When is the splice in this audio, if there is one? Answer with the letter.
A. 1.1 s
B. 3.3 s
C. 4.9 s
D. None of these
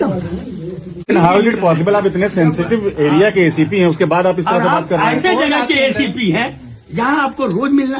A